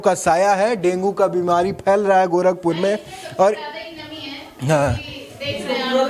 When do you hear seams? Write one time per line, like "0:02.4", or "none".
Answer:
none